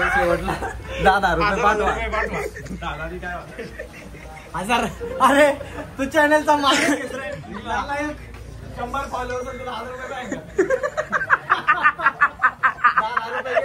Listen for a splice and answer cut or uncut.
uncut